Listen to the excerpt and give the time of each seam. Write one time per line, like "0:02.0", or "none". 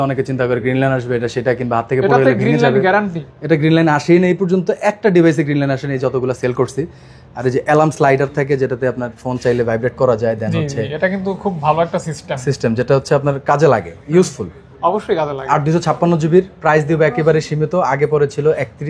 none